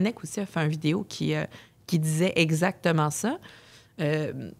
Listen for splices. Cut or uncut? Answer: uncut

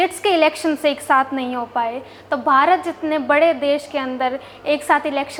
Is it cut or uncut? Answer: uncut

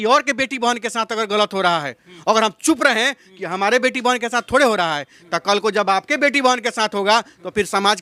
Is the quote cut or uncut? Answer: uncut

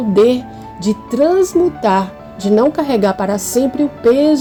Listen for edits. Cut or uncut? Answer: uncut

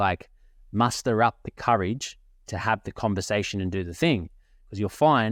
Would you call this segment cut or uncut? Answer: uncut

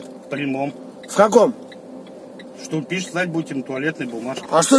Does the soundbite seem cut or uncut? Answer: uncut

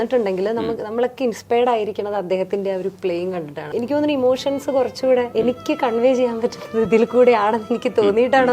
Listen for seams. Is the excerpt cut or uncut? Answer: cut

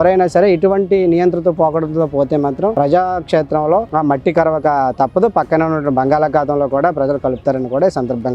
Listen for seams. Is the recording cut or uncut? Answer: uncut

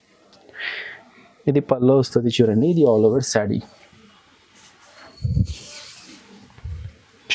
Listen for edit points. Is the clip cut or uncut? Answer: uncut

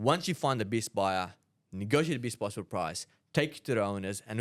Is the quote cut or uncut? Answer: uncut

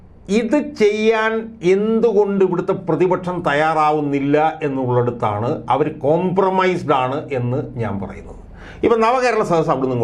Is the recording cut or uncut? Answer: uncut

